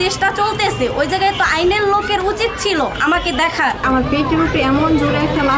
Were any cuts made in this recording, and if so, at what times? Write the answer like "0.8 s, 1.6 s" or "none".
3.9 s